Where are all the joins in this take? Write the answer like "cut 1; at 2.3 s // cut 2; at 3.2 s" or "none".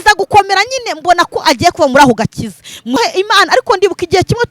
cut 1; at 3.0 s